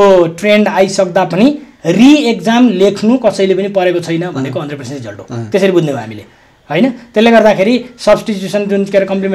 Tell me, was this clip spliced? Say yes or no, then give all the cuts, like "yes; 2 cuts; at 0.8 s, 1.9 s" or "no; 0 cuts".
no; 0 cuts